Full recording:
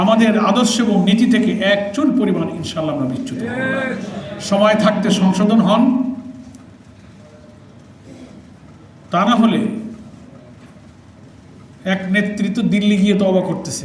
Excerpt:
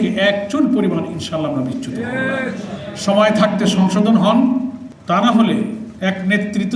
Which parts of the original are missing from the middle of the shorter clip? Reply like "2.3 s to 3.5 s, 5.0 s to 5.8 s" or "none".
6.3 s to 8.9 s, 9.9 s to 11.7 s